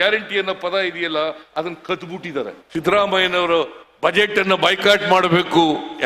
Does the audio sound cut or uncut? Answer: cut